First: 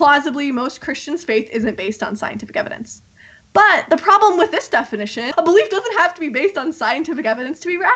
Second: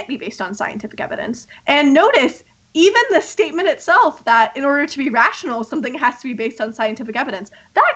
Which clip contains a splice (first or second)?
first